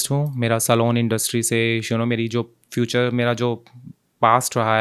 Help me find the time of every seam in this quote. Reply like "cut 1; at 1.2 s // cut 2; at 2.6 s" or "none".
none